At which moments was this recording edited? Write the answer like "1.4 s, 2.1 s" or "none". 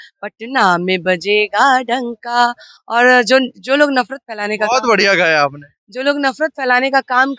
none